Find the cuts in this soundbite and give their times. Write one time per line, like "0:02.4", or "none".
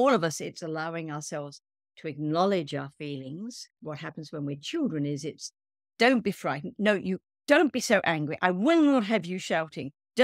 0:03.7